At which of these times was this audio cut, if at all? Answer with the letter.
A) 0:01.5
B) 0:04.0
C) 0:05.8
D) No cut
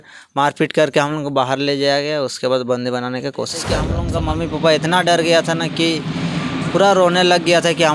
B